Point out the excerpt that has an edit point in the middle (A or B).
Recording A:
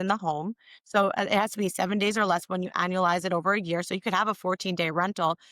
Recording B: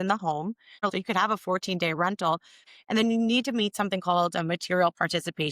B